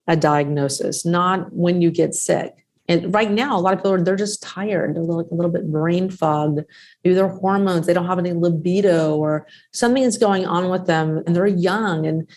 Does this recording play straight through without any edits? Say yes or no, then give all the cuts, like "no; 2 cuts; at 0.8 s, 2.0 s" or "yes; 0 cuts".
no; 1 cut; at 11.3 s